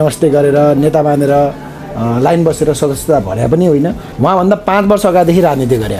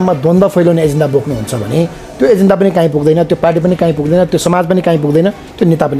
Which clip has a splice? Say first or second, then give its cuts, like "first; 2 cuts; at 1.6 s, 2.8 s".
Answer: first; 1 cut; at 4.0 s